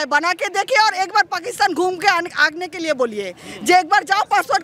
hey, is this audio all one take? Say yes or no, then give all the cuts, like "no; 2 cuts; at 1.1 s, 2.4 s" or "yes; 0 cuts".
yes; 0 cuts